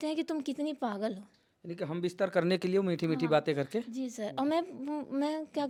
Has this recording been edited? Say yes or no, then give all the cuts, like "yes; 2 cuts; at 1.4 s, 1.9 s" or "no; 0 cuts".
no; 0 cuts